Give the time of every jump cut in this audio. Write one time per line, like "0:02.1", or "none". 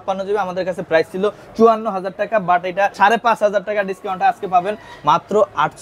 none